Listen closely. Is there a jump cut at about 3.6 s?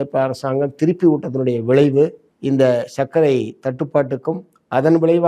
no; 1 cut; at 2.3 s

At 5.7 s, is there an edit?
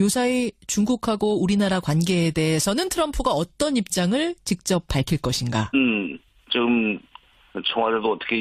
no; 0 cuts

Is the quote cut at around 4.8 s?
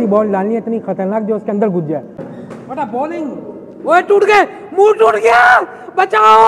no; 1 cut; at 2.2 s

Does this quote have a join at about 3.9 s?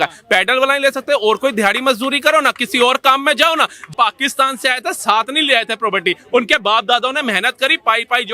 yes; 1 cut; at 3.9 s

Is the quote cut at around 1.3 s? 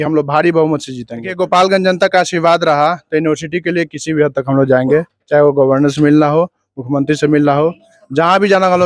yes; 1 cut; at 1.3 s

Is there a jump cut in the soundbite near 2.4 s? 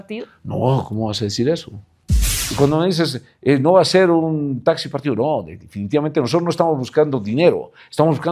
yes; 1 cut; at 2.4 s

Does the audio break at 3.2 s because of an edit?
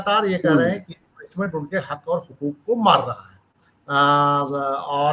no; 0 cuts

